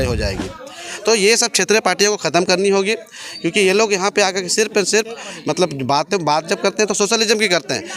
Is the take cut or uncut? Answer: uncut